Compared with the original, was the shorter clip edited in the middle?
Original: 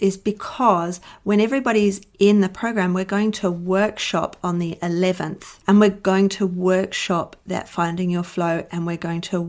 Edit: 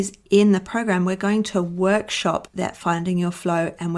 yes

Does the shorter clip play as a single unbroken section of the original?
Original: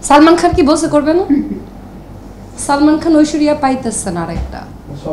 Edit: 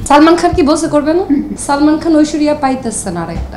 no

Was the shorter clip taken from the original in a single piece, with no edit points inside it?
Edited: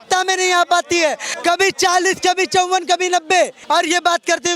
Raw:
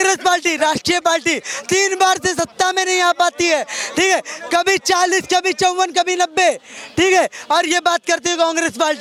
no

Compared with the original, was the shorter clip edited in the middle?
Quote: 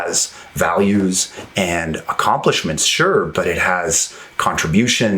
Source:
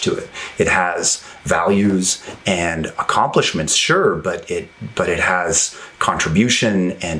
yes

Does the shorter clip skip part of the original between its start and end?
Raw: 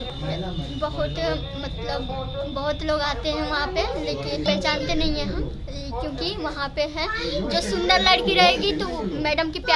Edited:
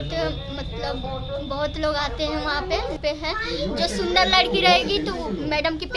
yes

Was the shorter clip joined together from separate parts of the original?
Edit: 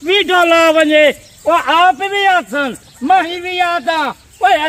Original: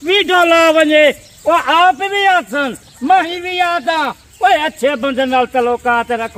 no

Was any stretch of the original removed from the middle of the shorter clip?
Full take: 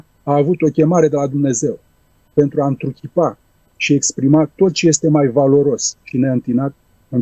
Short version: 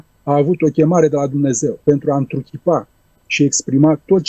yes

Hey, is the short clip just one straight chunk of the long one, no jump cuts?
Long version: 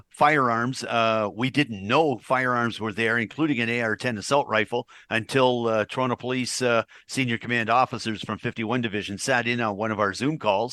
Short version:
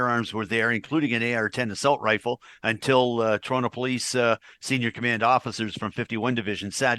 yes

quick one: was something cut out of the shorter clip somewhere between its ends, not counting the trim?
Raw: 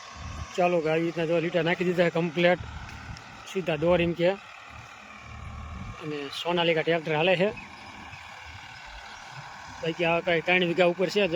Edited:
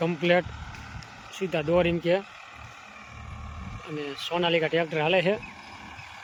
no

